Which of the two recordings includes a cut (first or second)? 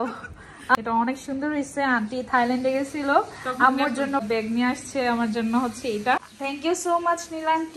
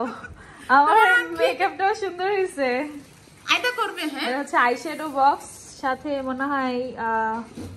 first